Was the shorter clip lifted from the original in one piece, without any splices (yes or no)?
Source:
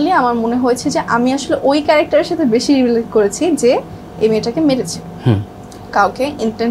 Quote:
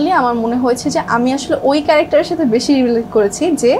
yes